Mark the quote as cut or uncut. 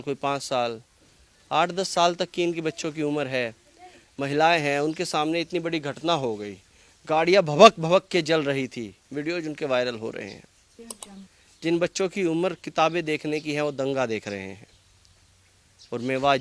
uncut